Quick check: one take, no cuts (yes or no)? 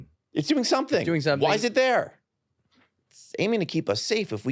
yes